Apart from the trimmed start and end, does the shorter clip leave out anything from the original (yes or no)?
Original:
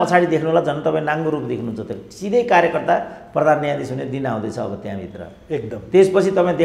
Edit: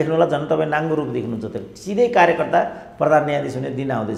no